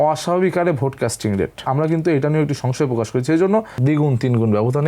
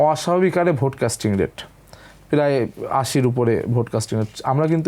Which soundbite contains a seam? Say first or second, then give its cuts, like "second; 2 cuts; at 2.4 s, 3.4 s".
first; 2 cuts; at 1.6 s, 3.7 s